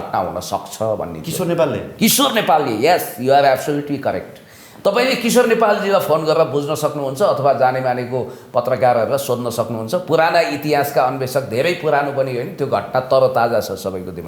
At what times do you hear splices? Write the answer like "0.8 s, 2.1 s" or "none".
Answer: none